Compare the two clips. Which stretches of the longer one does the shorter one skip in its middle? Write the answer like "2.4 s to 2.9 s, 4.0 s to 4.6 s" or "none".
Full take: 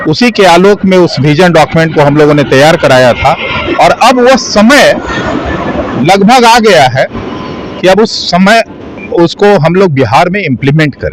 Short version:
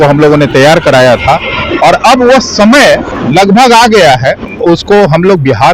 5.1 s to 5.8 s, 7.2 s to 9.0 s